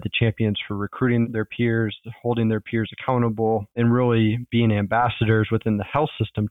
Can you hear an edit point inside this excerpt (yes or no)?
no